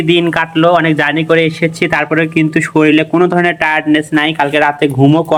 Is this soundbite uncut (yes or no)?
yes